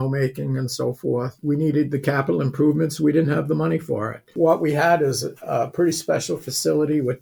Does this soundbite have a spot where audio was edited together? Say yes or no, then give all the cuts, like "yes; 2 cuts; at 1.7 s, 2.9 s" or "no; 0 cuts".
yes; 2 cuts; at 1.4 s, 4.3 s